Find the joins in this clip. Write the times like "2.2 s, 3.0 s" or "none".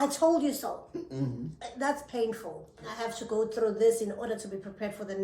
2.9 s